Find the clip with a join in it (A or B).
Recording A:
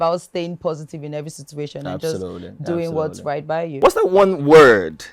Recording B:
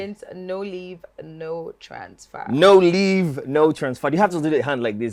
A